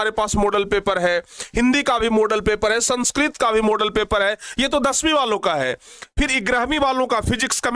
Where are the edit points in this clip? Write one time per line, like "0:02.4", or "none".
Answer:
none